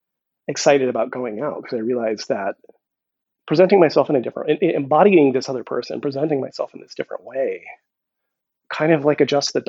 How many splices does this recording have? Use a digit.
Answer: 0